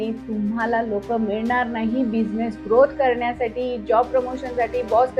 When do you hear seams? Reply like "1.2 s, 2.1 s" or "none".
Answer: none